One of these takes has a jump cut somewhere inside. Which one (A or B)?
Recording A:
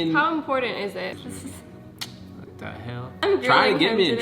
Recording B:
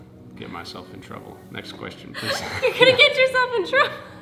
A